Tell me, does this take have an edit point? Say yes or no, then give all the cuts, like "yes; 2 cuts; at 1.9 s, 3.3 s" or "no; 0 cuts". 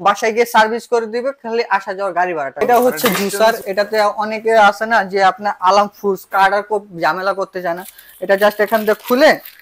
yes; 1 cut; at 2.6 s